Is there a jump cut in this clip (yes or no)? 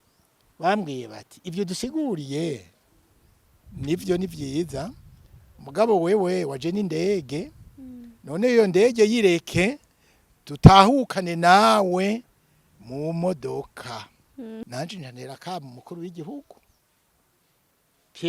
yes